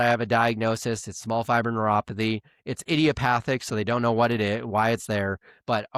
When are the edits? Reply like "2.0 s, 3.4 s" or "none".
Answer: none